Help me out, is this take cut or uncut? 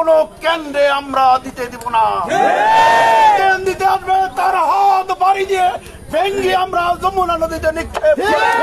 uncut